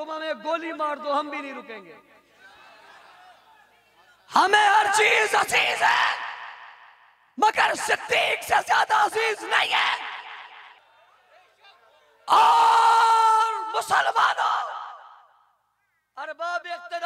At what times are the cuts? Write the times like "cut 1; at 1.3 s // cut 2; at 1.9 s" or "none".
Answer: cut 1; at 10.8 s